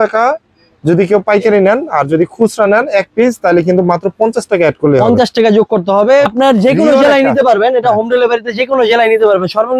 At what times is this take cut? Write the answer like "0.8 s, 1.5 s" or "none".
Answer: 6.3 s